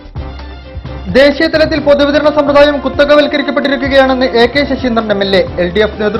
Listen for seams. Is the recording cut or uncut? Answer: cut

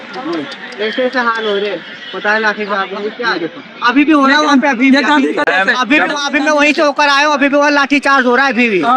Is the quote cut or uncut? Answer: uncut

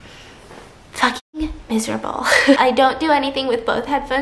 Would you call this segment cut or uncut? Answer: cut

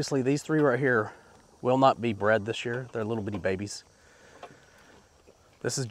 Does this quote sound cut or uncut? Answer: uncut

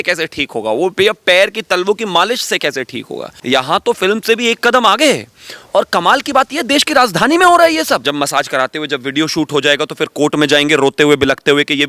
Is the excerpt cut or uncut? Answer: cut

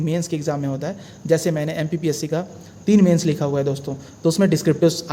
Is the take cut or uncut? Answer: uncut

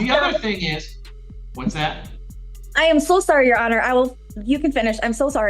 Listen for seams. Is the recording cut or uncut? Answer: uncut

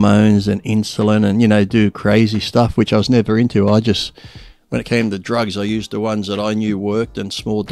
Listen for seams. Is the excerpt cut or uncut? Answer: uncut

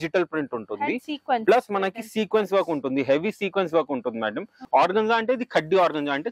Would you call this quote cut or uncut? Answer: cut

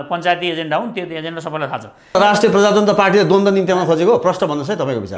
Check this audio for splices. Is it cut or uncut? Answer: cut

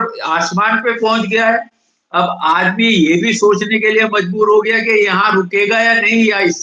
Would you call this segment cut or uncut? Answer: uncut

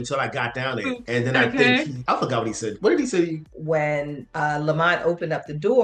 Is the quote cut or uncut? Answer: cut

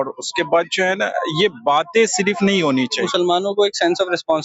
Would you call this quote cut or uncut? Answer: cut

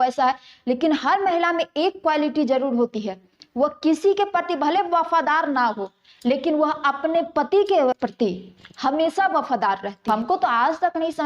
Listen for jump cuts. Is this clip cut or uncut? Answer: cut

